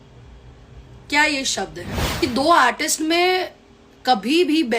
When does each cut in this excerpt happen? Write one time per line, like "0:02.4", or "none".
0:02.2